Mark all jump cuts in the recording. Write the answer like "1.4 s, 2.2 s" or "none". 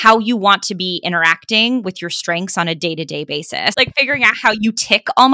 3.7 s